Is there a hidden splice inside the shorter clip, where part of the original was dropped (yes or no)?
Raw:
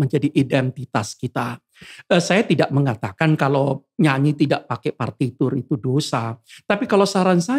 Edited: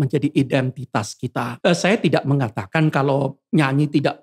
yes